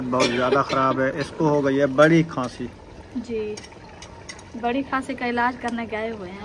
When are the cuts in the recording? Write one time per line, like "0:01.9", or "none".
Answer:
none